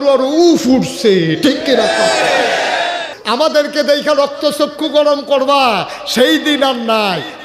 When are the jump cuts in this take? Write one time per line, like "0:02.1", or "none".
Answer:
0:03.1